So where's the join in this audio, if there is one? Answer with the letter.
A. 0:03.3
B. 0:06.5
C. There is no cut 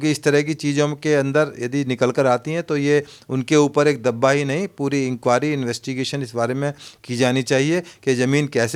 C